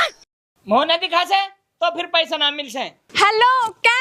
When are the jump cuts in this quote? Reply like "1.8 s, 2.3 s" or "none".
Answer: 3.0 s